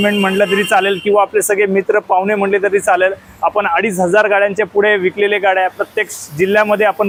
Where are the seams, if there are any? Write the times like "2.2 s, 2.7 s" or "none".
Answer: none